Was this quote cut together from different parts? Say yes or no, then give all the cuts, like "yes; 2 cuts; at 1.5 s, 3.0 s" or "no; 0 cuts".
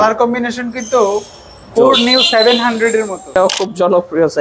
yes; 1 cut; at 3.3 s